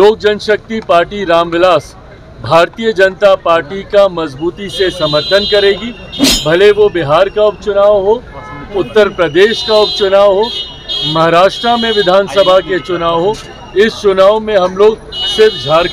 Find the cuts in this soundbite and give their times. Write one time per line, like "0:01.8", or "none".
none